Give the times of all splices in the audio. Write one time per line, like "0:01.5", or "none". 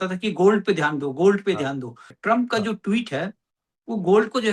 0:02.1